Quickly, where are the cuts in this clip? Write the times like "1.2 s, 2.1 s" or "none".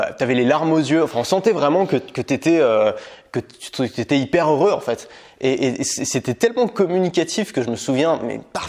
none